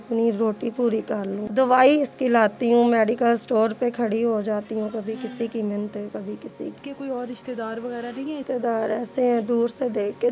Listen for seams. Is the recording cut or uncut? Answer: cut